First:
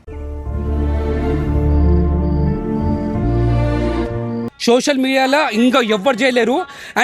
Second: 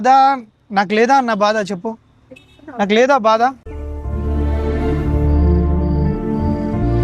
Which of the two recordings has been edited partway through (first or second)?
first